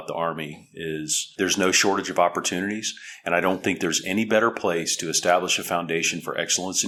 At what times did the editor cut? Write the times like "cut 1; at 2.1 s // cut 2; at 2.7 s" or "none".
none

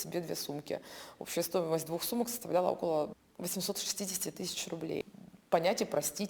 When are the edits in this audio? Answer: cut 1; at 3.2 s // cut 2; at 5.1 s

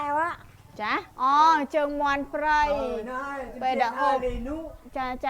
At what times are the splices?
cut 1; at 1.1 s

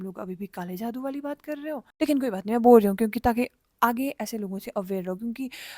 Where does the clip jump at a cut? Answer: cut 1; at 1.9 s

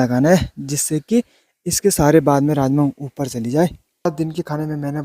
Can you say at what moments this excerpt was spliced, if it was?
cut 1; at 3.9 s

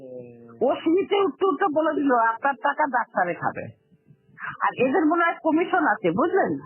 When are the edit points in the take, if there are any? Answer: none

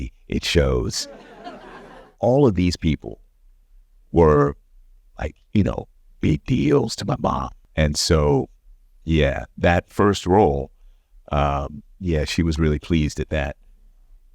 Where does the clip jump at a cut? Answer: cut 1; at 2.0 s // cut 2; at 7.5 s

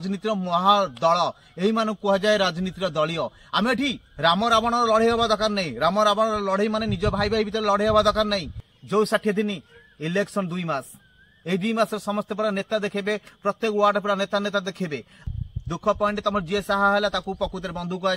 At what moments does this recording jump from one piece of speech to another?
cut 1; at 8.7 s // cut 2; at 15.2 s

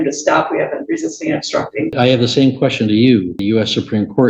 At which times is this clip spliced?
cut 1; at 1.9 s // cut 2; at 3.4 s

